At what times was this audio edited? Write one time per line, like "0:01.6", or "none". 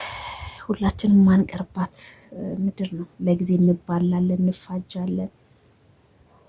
none

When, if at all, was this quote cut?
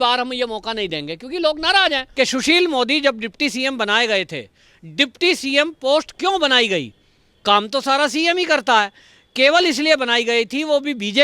0:02.0

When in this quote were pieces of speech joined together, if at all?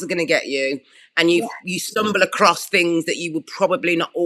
none

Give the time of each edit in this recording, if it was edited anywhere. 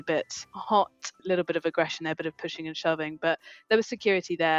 0:01.0

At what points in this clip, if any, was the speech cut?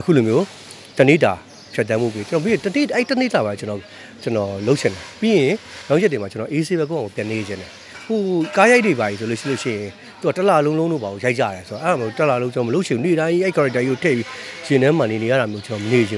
none

